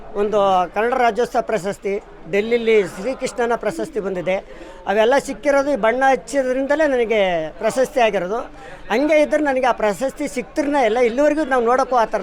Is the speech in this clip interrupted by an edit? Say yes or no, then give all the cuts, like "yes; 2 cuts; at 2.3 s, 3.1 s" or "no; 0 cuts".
no; 0 cuts